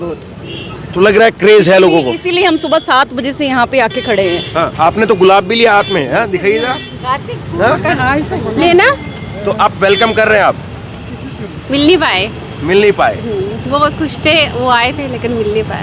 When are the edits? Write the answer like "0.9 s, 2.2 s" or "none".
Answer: none